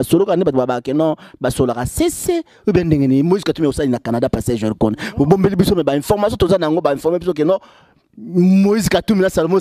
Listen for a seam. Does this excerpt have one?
no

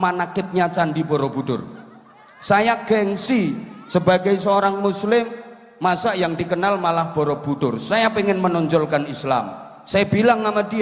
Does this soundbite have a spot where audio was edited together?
no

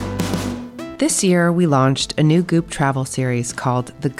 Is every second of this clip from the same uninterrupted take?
no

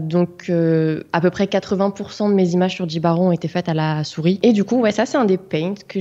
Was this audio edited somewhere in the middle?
yes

